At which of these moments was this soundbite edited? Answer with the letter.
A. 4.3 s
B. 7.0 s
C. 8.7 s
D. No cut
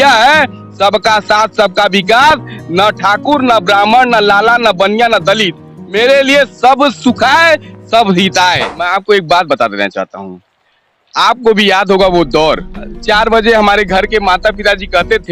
C